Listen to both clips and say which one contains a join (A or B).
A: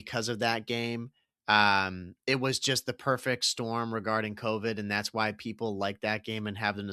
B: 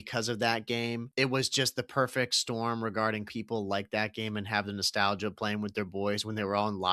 B